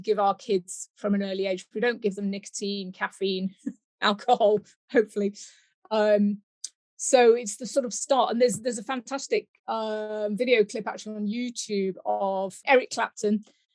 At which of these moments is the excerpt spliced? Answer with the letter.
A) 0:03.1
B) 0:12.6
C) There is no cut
B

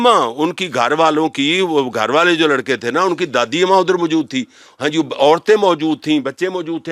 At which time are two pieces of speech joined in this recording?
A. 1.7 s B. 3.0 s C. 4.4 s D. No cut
D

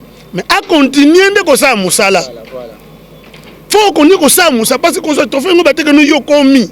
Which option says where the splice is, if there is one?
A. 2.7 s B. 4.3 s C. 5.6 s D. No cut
D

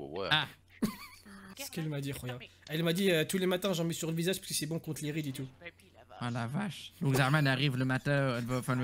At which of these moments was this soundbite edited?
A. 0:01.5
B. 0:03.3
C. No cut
A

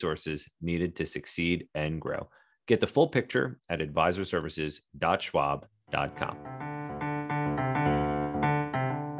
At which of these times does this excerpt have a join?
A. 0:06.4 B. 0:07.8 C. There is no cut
A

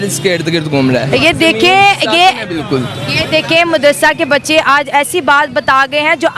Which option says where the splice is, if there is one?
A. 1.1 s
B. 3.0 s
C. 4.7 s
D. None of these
A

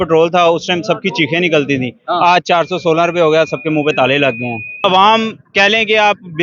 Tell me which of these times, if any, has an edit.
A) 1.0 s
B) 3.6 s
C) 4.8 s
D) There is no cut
C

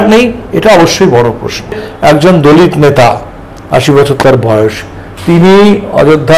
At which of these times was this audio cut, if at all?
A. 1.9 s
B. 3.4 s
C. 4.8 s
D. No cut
A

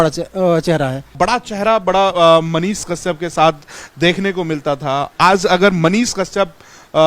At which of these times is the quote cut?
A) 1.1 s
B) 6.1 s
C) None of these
A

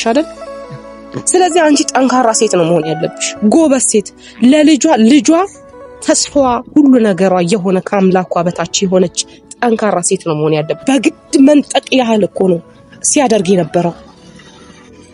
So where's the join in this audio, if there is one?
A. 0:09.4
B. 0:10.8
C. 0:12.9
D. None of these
B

